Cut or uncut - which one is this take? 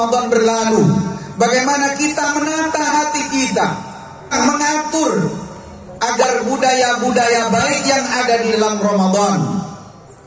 cut